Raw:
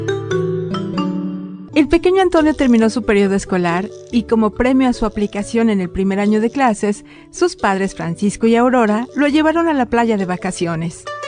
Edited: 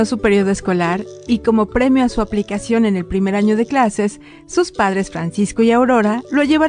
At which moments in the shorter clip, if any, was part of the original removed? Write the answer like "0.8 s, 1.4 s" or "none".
none